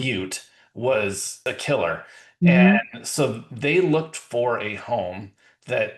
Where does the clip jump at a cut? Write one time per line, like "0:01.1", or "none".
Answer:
0:01.4